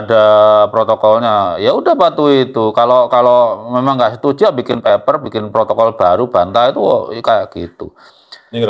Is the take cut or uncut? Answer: uncut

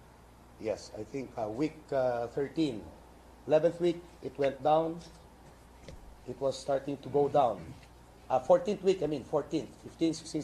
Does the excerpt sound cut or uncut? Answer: uncut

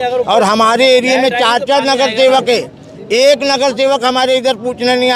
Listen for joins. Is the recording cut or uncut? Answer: uncut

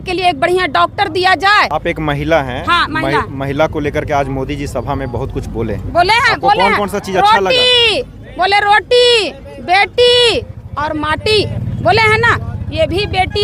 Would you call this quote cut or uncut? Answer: uncut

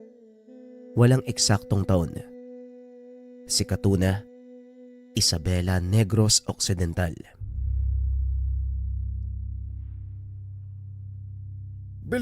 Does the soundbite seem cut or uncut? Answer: cut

